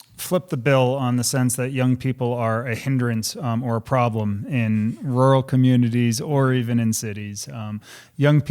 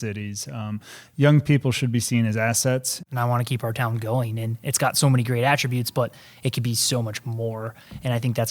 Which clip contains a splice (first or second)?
second